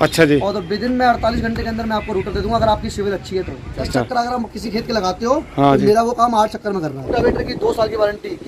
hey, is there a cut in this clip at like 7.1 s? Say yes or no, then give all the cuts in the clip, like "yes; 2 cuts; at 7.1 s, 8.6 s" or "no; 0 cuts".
yes; 2 cuts; at 3.9 s, 7.1 s